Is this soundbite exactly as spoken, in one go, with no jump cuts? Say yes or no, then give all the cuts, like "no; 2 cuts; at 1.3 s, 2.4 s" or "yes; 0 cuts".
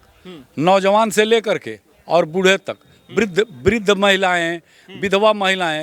yes; 0 cuts